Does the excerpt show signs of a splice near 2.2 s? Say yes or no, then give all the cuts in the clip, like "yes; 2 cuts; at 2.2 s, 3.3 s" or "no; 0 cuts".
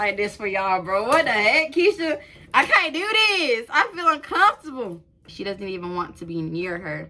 no; 1 cut; at 5.3 s